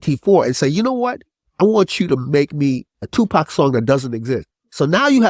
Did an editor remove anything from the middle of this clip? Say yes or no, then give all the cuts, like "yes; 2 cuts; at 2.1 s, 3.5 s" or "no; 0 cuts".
yes; 2 cuts; at 1.5 s, 2.9 s